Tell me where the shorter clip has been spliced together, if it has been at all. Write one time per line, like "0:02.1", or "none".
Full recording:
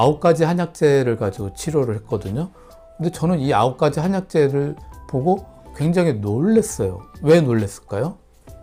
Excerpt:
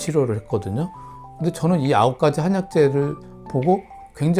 none